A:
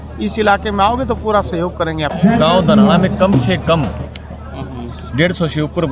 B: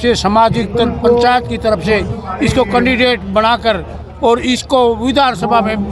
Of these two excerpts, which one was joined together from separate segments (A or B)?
A